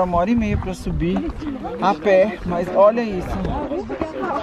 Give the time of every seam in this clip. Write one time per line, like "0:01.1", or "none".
none